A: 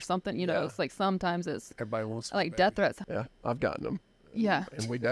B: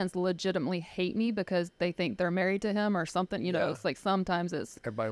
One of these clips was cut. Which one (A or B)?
A